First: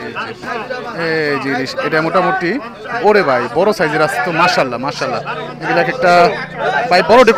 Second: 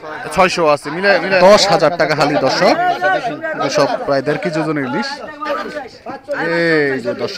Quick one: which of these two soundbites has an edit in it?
second; 2 cuts; at 1.4 s, 5.5 s

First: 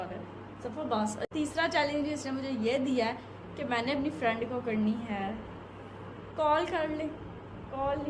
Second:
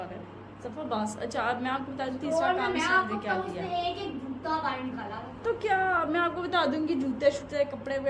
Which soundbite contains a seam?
first; 1 cut; at 1.2 s

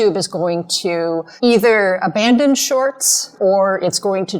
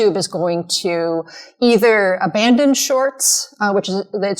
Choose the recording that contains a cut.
first; 2 cuts; at 1.3 s, 3.3 s

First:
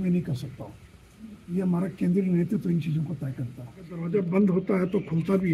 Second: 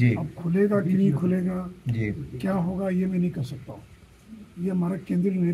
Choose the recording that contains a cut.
first; 1 cut; at 4.0 s

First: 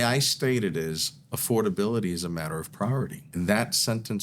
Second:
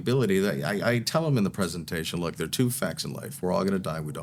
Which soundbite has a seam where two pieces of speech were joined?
first; 1 cut; at 3.2 s

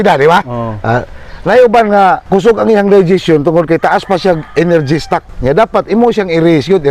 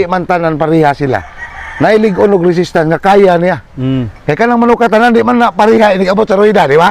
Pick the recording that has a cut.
first; 2 cuts; at 2.2 s, 5.3 s

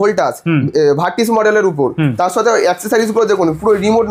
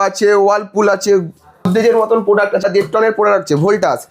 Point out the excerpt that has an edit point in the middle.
second; 2 cuts; at 1.7 s, 2.6 s

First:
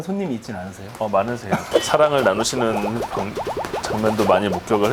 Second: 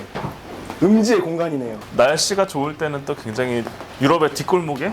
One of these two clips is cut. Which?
second; 1 cut; at 1.8 s

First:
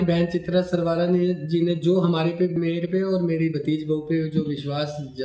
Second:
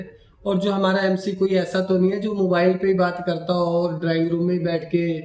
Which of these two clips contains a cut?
first; 1 cut; at 2.5 s

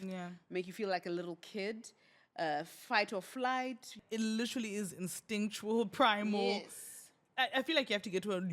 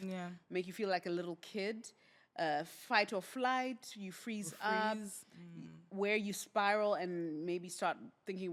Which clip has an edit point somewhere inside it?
first; 1 cut; at 4.0 s

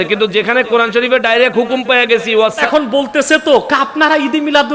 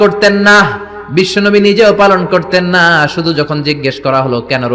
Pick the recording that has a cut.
first; 1 cut; at 2.6 s

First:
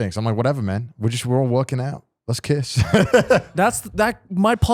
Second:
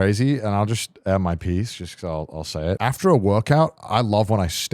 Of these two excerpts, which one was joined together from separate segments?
second; 1 cut; at 2.8 s

